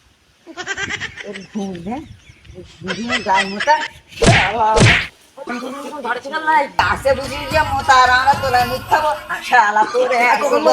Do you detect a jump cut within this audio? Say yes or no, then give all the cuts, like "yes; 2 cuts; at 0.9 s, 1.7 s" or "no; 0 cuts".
yes; 1 cut; at 6.7 s